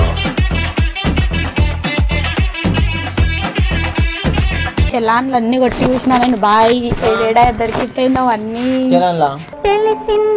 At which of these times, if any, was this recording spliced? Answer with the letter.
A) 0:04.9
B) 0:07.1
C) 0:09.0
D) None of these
A